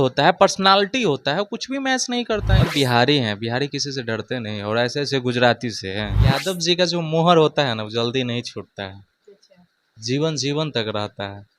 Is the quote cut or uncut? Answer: cut